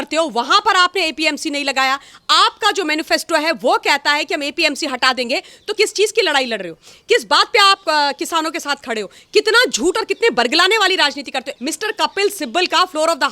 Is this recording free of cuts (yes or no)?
no